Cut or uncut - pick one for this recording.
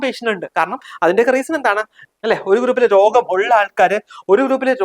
cut